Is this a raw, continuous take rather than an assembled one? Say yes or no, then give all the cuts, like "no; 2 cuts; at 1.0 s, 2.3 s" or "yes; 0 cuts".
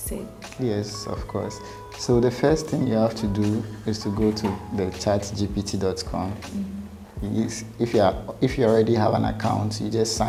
yes; 0 cuts